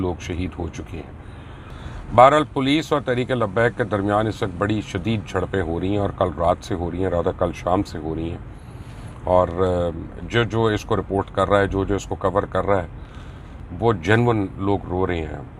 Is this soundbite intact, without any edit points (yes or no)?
yes